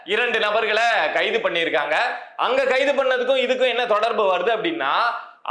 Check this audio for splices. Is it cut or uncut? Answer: uncut